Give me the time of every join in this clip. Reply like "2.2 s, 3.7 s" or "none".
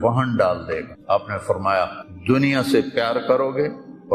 0.9 s, 2.0 s